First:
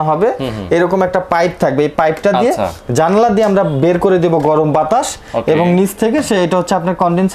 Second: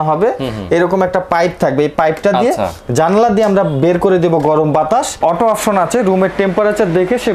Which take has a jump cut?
second; 1 cut; at 5.1 s

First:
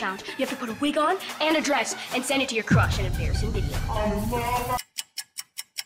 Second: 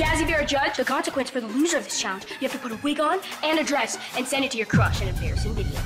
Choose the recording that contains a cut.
first; 1 cut; at 4.9 s

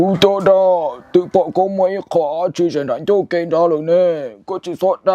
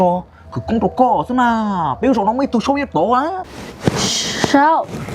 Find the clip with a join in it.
second; 1 cut; at 3.4 s

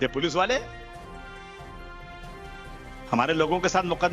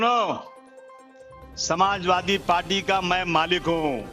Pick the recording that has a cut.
first; 2 cuts; at 1.1 s, 3.1 s

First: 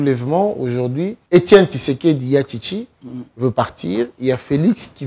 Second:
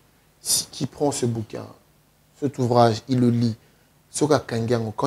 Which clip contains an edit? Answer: first; 1 cut; at 1.2 s

